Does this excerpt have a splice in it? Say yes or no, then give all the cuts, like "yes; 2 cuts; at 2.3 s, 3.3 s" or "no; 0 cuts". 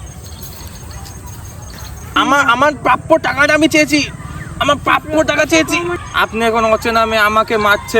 yes; 2 cuts; at 2.1 s, 5.9 s